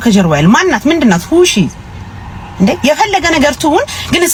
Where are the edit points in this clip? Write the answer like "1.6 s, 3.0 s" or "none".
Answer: none